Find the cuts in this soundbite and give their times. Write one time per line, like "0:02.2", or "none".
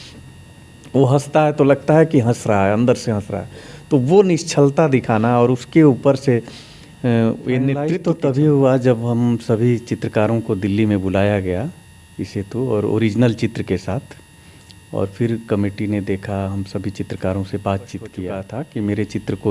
0:07.9
0:18.4